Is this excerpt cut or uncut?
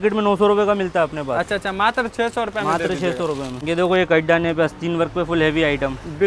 uncut